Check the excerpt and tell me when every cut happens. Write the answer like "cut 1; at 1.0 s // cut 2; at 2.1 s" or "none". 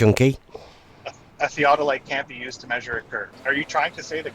cut 1; at 3.3 s